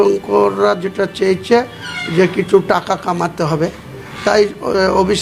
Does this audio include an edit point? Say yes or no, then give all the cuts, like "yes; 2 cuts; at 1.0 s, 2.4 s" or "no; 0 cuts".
no; 0 cuts